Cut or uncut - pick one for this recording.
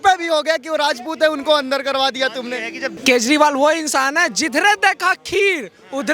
cut